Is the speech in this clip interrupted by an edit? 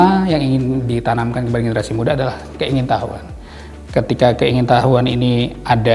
no; 0 cuts

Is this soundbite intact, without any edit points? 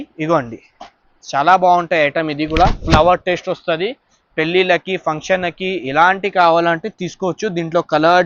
yes; 0 cuts

